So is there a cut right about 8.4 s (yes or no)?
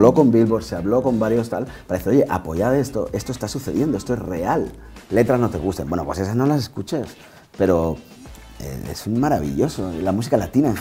no